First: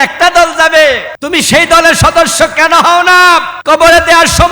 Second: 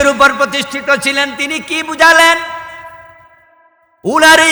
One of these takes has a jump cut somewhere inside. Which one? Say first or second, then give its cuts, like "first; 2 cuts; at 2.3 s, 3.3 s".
first; 2 cuts; at 1.1 s, 3.5 s